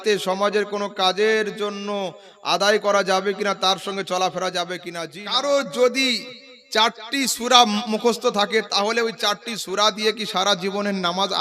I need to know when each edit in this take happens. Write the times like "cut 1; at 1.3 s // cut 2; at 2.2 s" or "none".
cut 1; at 4.8 s